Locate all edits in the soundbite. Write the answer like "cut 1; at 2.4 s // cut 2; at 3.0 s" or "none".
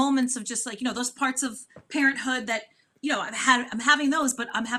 none